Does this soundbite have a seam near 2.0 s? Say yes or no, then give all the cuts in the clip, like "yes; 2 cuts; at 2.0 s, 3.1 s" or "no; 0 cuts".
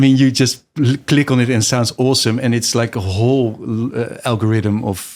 no; 0 cuts